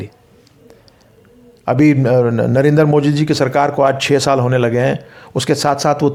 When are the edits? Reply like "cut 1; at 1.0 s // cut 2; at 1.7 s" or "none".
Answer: none